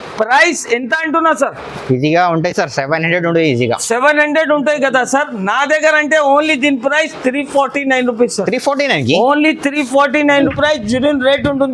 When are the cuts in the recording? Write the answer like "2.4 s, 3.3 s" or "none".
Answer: 10.5 s